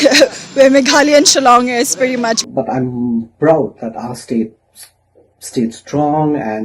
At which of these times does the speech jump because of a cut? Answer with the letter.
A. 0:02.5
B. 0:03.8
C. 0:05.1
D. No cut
A